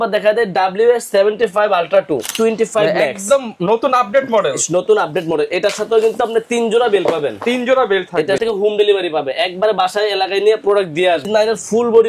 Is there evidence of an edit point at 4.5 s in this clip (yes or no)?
no